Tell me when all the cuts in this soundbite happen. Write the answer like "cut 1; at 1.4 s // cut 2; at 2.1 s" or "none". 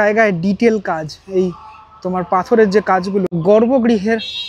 cut 1; at 3.3 s